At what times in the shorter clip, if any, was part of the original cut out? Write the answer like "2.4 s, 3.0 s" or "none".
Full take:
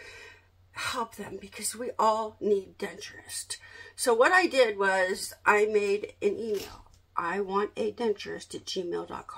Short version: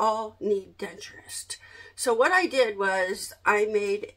none